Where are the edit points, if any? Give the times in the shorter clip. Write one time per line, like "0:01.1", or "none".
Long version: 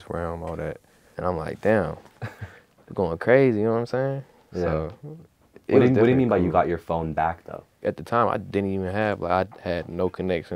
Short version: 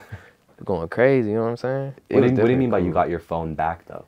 0:01.9